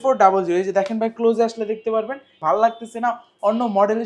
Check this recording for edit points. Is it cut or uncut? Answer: cut